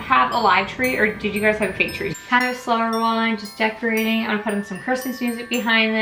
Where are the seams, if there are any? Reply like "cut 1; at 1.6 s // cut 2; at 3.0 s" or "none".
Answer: cut 1; at 2.0 s